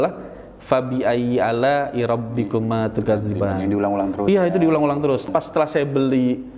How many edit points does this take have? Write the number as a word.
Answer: one